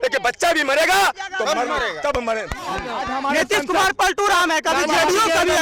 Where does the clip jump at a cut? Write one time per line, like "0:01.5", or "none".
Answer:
0:02.9